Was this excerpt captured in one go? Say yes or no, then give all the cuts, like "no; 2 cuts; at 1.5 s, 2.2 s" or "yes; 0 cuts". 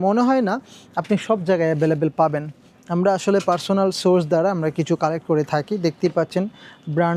yes; 0 cuts